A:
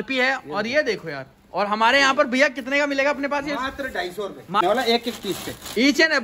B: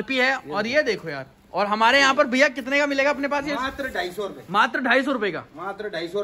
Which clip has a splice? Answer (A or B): A